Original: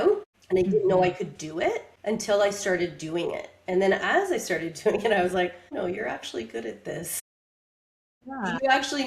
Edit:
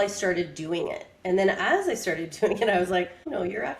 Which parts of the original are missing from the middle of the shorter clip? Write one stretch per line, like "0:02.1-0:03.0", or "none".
none